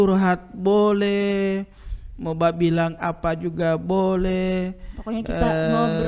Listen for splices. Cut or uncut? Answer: uncut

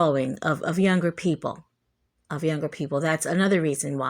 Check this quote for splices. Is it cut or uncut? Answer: uncut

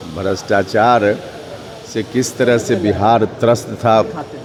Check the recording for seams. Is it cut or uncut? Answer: uncut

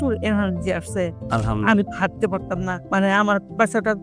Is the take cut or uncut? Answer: cut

